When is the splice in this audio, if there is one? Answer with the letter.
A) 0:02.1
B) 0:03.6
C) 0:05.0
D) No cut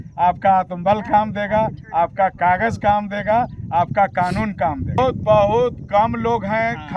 C